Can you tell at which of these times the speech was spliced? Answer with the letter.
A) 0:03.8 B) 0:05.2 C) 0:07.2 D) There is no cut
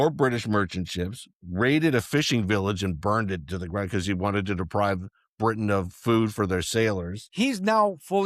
C